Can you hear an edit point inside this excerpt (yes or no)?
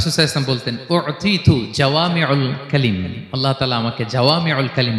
no